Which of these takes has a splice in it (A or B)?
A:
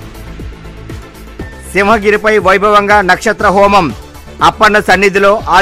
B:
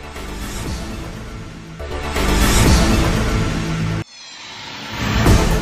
A